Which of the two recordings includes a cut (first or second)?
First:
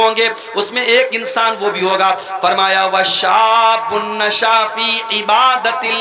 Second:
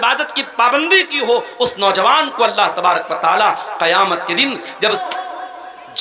second